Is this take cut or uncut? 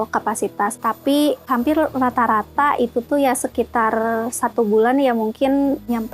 uncut